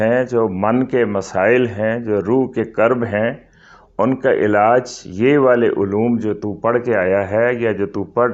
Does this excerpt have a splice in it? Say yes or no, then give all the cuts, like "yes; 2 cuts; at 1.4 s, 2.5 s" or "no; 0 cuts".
no; 0 cuts